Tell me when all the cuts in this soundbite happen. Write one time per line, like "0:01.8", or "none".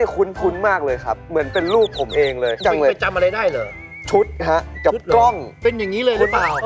none